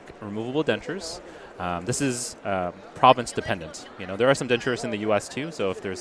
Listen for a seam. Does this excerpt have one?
no; 0 cuts

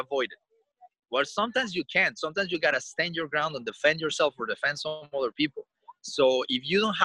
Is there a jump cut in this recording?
no; 0 cuts

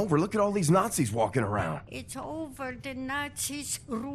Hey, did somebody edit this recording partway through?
yes; 1 cut; at 1.9 s

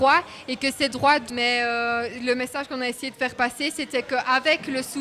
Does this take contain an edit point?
yes; 1 cut; at 1.2 s

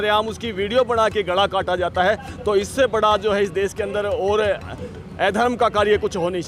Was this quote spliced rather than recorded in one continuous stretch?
no; 0 cuts

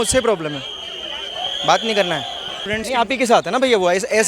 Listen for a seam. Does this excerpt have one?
yes; 1 cut; at 2.6 s

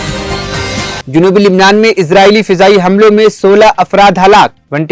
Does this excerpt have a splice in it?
no; 0 cuts

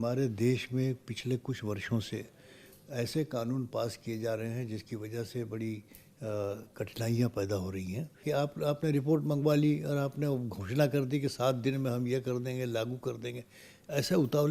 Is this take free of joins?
no; 1 cut; at 8.2 s

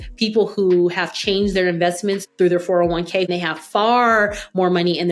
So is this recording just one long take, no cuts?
no; 2 cuts; at 2.2 s, 3.3 s

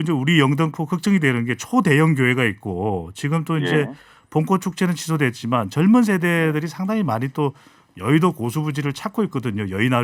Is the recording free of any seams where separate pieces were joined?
yes; 0 cuts

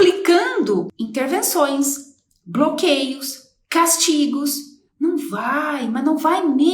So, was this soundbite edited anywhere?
yes; 1 cut; at 0.9 s

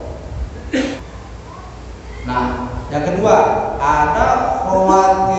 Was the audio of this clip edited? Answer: yes; 1 cut; at 1.0 s

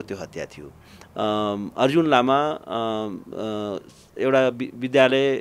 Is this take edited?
no; 0 cuts

